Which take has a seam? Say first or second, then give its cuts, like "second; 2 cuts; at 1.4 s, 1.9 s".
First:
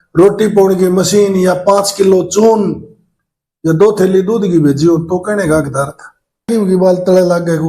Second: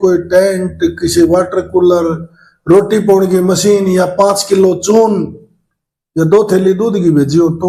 first; 1 cut; at 6.5 s